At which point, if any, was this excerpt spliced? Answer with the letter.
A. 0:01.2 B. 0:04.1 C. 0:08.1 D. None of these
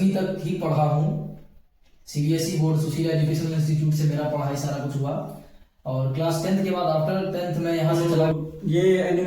C